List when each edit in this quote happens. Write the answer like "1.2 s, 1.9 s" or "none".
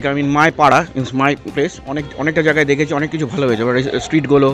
none